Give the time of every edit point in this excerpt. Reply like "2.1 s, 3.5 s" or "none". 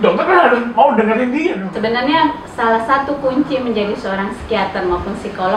1.6 s